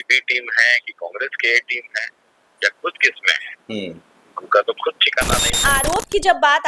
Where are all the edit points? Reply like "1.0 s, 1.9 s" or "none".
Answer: 5.6 s